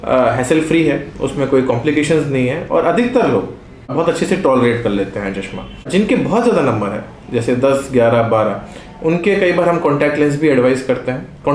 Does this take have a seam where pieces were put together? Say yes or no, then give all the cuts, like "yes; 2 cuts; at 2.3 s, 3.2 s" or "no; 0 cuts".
no; 0 cuts